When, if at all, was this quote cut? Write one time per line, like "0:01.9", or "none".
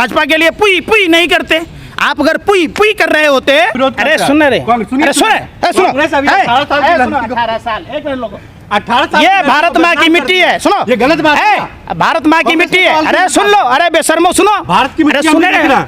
0:03.7